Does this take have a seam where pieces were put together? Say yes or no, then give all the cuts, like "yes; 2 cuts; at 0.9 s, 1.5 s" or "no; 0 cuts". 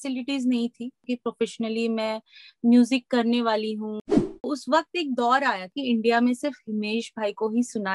yes; 3 cuts; at 1.0 s, 4.4 s, 5.7 s